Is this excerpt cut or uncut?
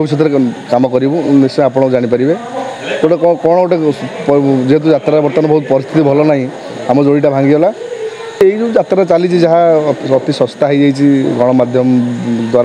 cut